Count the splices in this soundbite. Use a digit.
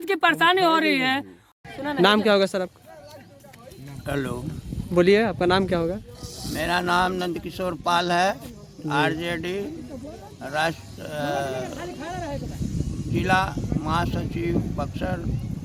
0